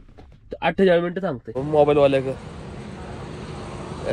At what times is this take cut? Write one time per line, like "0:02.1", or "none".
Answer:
0:01.6